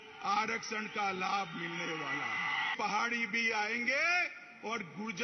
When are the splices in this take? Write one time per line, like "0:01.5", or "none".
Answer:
0:02.7